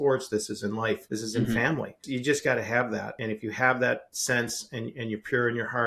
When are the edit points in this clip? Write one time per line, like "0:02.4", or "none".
0:01.0
0:02.0
0:03.1
0:04.1